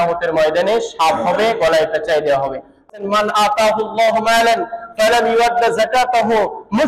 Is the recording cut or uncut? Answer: cut